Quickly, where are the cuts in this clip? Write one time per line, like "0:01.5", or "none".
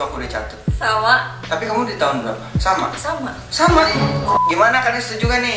0:04.4

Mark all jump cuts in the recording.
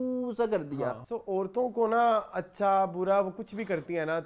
0:01.0

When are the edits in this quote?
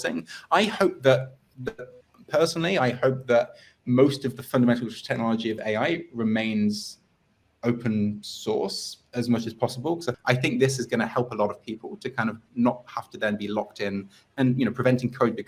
0:10.1

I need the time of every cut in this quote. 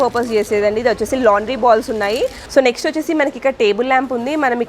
0:02.4

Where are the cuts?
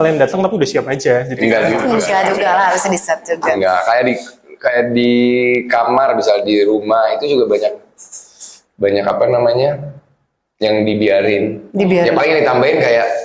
none

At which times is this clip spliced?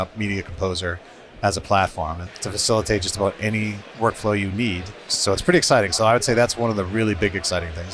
0:02.3
0:05.1

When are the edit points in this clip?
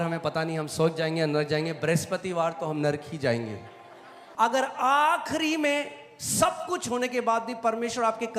0:04.2

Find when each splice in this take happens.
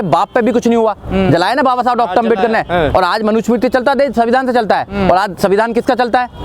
none

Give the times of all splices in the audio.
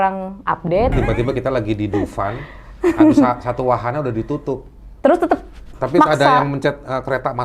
0:00.9

